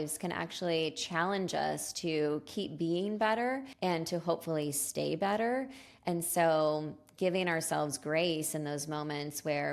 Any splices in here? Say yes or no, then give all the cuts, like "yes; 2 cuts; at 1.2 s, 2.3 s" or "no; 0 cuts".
yes; 1 cut; at 3.7 s